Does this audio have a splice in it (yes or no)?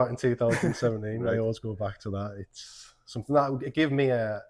no